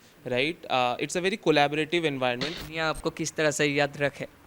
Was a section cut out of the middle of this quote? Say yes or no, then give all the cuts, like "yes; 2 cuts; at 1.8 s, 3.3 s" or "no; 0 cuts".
yes; 1 cut; at 2.6 s